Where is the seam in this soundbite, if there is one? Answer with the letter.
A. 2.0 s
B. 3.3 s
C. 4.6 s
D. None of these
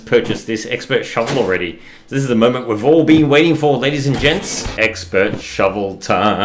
C